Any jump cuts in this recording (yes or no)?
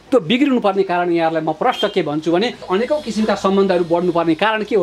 yes